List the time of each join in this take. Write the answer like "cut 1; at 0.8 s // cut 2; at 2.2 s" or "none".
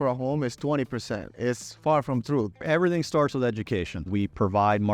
cut 1; at 1.3 s // cut 2; at 2.6 s // cut 3; at 4.1 s

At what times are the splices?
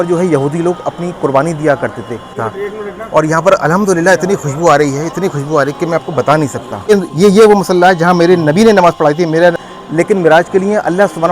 cut 1; at 2.5 s // cut 2; at 6.9 s // cut 3; at 9.7 s

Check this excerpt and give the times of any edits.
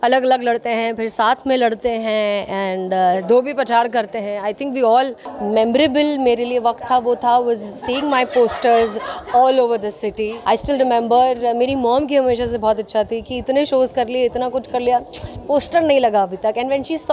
cut 1; at 5.3 s // cut 2; at 10.3 s

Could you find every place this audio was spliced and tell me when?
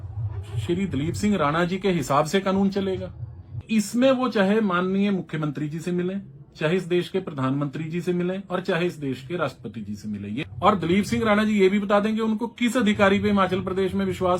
cut 1; at 3.6 s // cut 2; at 10.4 s

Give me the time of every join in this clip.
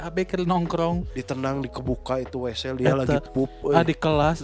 cut 1; at 1.1 s

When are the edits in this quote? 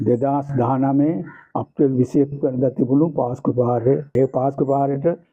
cut 1; at 4.1 s

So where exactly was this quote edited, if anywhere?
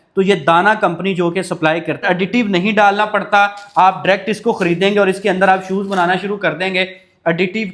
cut 1; at 2.0 s

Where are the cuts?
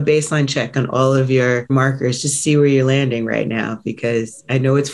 cut 1; at 1.7 s

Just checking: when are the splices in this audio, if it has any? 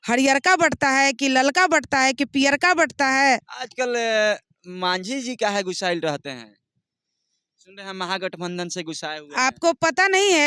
cut 1; at 3.5 s

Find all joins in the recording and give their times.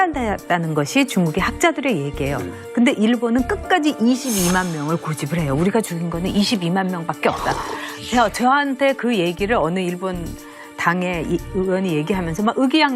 cut 1; at 11.2 s

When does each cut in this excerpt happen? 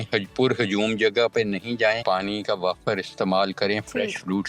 cut 1; at 2.0 s

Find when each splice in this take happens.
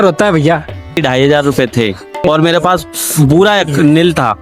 cut 1; at 1.0 s // cut 2; at 2.2 s

